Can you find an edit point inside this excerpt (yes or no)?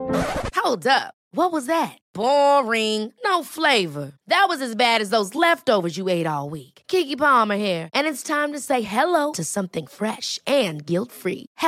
no